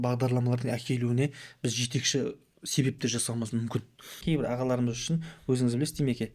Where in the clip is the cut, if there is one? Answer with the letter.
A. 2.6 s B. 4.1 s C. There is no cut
B